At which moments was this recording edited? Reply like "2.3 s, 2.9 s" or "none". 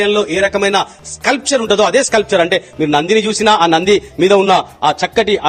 none